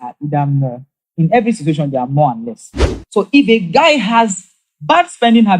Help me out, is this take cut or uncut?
cut